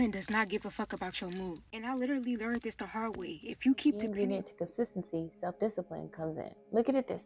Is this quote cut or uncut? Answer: cut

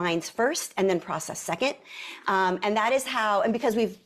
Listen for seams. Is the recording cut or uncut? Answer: uncut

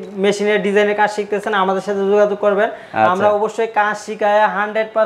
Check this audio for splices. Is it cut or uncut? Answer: uncut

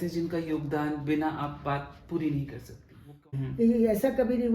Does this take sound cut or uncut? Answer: cut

